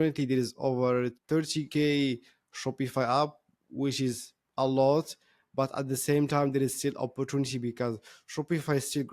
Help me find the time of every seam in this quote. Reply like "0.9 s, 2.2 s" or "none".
1.3 s